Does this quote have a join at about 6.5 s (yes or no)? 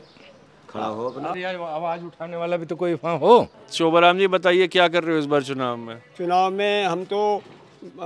no